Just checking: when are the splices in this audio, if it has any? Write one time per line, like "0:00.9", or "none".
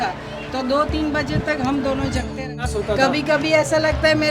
0:02.7